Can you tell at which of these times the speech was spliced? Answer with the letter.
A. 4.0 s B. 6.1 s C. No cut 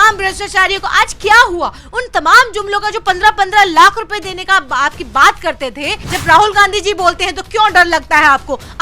B